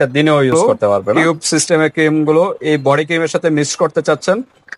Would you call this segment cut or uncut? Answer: cut